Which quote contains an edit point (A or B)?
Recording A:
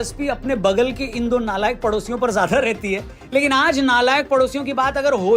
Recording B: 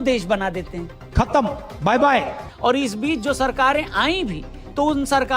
B